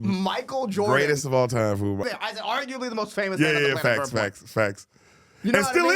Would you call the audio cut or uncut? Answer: cut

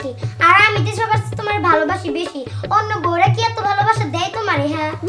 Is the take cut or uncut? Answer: uncut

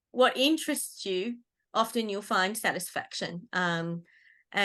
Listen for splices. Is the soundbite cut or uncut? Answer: uncut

